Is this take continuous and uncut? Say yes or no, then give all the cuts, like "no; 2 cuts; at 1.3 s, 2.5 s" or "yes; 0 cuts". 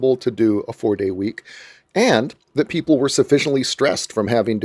yes; 0 cuts